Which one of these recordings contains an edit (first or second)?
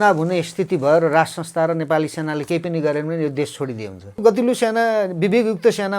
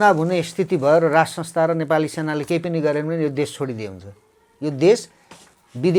first